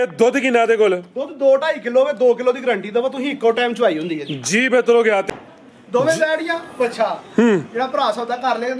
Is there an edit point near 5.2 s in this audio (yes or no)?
yes